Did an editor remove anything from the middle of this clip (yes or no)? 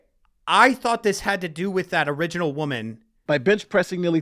yes